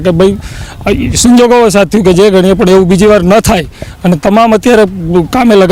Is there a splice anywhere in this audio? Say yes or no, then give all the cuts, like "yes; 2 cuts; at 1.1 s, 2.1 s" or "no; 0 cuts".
no; 0 cuts